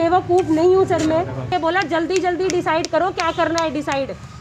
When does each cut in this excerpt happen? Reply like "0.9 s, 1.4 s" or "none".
1.5 s